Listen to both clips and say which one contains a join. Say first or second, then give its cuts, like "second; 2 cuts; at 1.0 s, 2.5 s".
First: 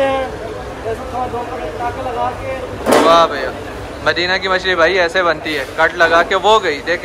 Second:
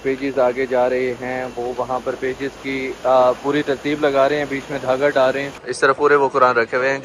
second; 1 cut; at 5.5 s